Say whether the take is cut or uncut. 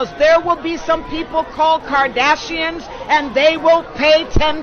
cut